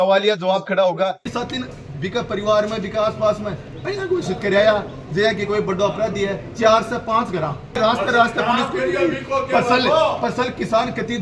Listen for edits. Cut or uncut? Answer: cut